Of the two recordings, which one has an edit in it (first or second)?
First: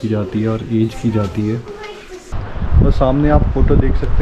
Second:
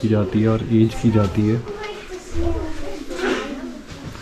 first